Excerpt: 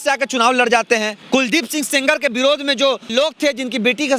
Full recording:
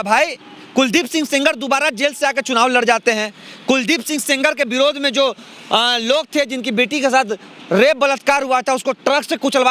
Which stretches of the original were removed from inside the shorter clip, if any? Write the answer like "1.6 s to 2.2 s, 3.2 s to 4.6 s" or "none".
3.3 s to 3.5 s, 5.4 s to 6.0 s